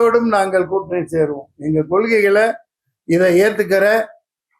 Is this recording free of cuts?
yes; 0 cuts

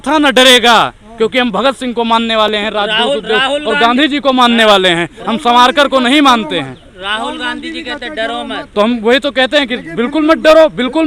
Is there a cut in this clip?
no; 0 cuts

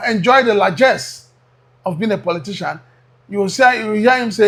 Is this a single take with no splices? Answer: yes; 0 cuts

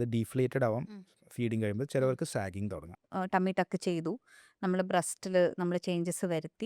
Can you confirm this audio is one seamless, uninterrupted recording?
no; 1 cut; at 3.0 s

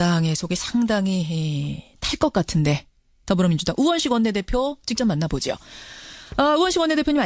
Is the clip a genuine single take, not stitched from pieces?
yes; 0 cuts

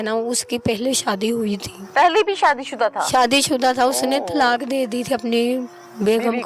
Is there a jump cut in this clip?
yes; 1 cut; at 1.7 s

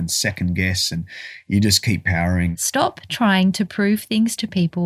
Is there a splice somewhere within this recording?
yes; 1 cut; at 2.6 s

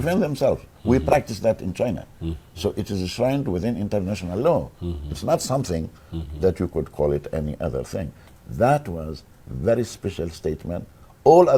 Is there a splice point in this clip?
no; 0 cuts

